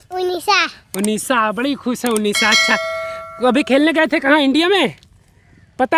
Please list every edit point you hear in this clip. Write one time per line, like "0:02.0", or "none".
none